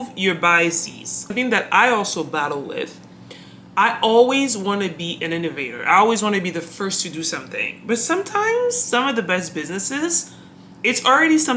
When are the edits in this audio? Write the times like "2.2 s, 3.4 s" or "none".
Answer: 1.2 s